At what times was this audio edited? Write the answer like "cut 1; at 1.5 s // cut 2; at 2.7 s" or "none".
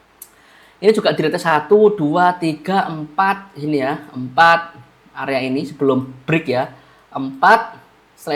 none

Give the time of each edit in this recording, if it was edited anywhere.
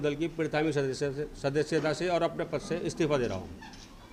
none

